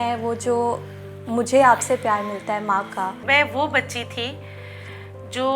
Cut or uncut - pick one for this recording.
cut